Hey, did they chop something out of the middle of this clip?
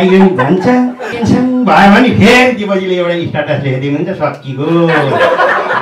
yes; 1 cut; at 1.1 s

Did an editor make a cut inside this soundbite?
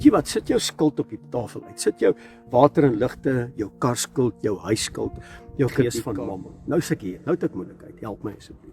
yes; 1 cut; at 5.9 s

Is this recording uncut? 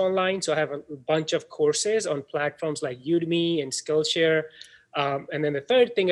yes; 0 cuts

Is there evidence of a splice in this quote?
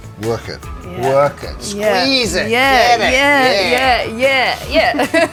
no; 0 cuts

